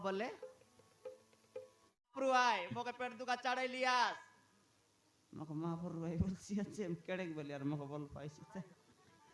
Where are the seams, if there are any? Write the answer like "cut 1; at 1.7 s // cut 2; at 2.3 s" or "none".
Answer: cut 1; at 2.1 s

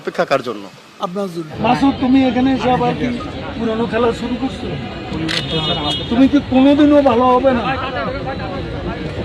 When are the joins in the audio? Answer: cut 1; at 1.5 s

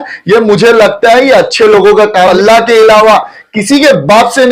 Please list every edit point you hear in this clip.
cut 1; at 2.3 s

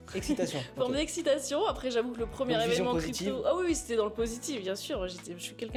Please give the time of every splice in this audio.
none

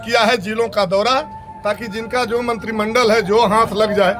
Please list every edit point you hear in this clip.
none

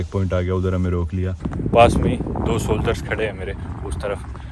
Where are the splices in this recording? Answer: cut 1; at 1.5 s

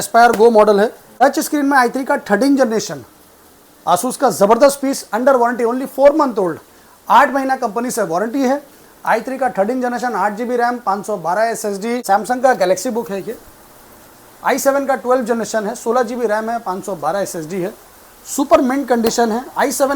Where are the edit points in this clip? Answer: cut 1; at 1.0 s // cut 2; at 12.0 s

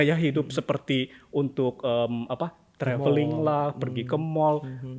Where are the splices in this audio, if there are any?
none

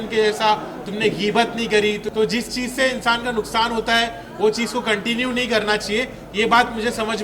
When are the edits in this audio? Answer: cut 1; at 2.0 s

